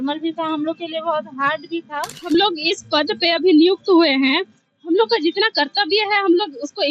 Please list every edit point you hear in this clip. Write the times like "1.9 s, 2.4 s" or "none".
2.1 s